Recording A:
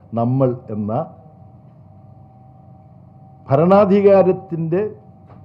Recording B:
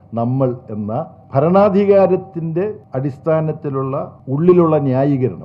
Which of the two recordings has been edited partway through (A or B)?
B